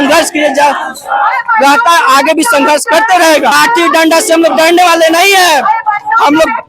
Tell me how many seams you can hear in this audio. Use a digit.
1